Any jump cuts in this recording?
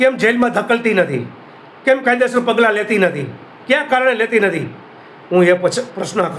no; 0 cuts

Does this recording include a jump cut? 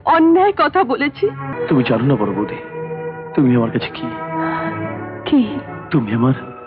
yes; 2 cuts; at 1.5 s, 5.7 s

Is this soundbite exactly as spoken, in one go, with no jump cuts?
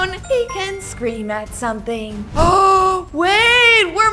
no; 1 cut; at 2.3 s

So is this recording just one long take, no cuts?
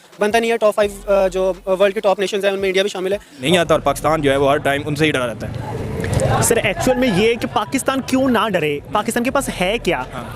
no; 1 cut; at 3.4 s

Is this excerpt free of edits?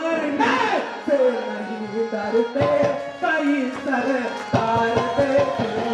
yes; 0 cuts

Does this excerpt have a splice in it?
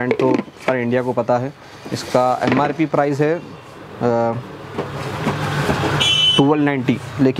no; 0 cuts

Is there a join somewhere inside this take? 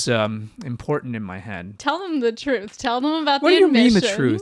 yes; 1 cut; at 1.7 s

